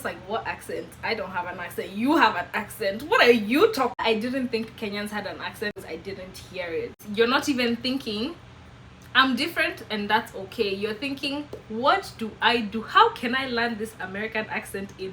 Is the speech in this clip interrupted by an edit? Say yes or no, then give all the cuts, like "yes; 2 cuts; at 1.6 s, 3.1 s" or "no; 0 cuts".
yes; 3 cuts; at 4.0 s, 5.8 s, 7.0 s